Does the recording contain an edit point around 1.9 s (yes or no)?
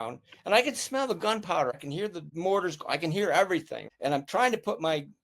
yes